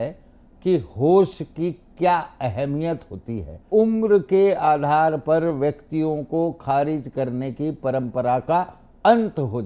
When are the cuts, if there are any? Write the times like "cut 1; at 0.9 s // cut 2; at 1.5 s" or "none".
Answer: cut 1; at 3.7 s